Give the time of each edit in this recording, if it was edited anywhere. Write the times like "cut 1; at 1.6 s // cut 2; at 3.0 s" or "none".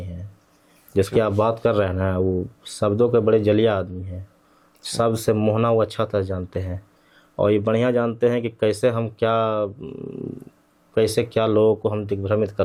none